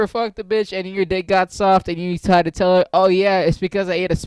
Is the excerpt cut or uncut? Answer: uncut